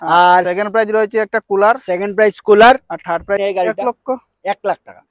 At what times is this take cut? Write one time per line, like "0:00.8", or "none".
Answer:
0:03.4